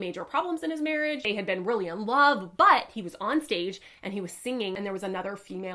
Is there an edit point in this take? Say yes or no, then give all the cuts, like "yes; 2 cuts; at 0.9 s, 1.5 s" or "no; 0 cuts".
yes; 2 cuts; at 1.3 s, 4.8 s